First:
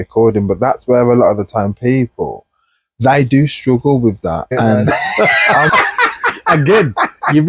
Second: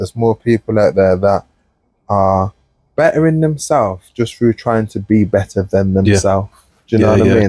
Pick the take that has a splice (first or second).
first